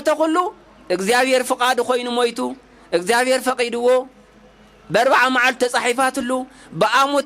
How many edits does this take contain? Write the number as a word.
zero